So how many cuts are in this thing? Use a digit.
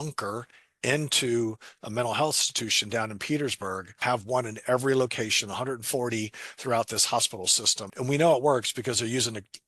2